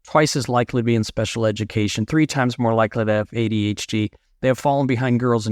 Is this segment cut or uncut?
uncut